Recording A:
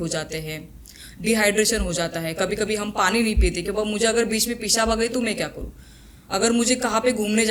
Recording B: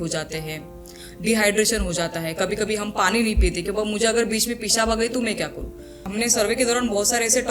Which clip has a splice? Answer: B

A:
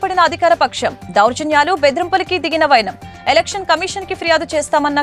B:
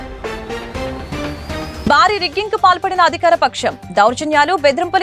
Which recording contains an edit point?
B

